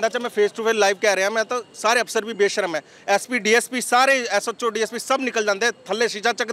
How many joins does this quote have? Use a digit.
0